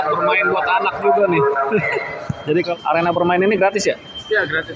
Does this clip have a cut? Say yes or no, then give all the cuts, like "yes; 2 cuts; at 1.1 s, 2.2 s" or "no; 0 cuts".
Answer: yes; 1 cut; at 2.7 s